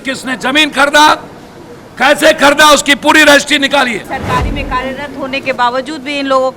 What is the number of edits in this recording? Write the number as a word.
one